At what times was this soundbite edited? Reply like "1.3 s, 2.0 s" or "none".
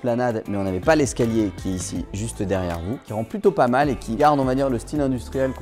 3.0 s, 4.2 s